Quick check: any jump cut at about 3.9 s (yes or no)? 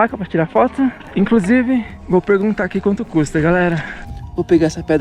yes